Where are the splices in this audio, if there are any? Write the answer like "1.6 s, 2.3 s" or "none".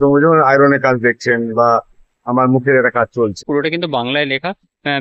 3.4 s